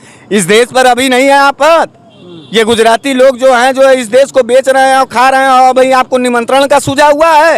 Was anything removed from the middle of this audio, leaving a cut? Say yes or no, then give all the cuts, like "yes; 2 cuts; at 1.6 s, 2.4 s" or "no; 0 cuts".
no; 0 cuts